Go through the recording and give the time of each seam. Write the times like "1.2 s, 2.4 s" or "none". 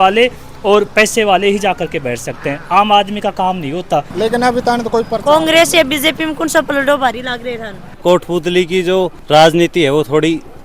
4.1 s, 7.9 s